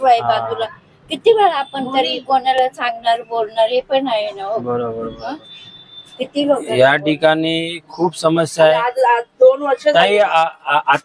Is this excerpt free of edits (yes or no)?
yes